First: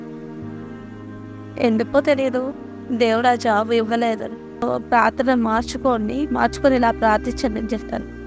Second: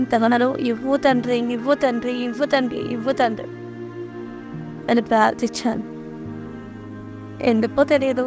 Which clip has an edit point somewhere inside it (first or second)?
first